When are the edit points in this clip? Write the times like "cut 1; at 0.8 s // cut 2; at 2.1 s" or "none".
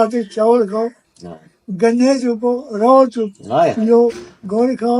none